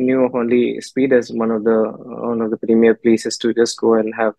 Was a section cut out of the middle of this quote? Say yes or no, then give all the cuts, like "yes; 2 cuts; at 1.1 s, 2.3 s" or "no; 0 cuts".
no; 0 cuts